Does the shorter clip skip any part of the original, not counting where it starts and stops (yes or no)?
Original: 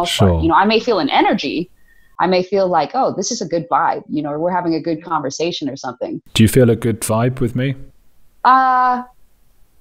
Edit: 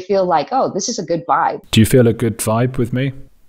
yes